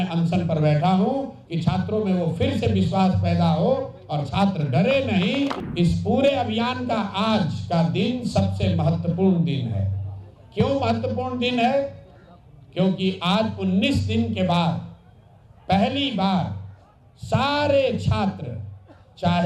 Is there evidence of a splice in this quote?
yes; 1 cut; at 5.6 s

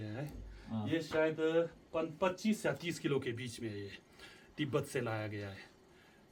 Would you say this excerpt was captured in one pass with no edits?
yes; 0 cuts

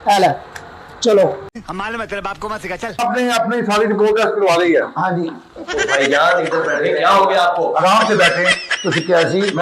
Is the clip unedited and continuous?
no; 2 cuts; at 1.5 s, 3.0 s

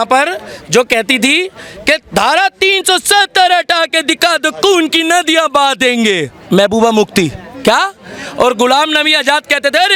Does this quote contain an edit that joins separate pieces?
no; 0 cuts

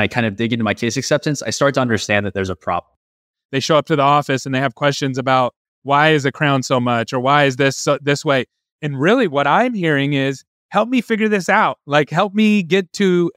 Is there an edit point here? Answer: yes; 1 cut; at 3.2 s

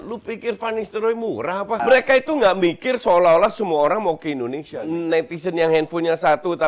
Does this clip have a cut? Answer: yes; 2 cuts; at 1.8 s, 4.7 s

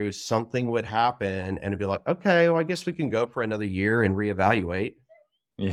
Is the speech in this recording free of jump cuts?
yes; 0 cuts

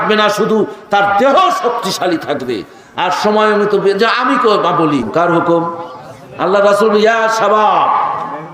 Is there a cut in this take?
yes; 1 cut; at 5.1 s

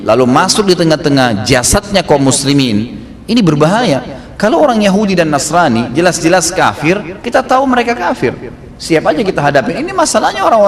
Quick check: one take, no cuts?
yes; 0 cuts

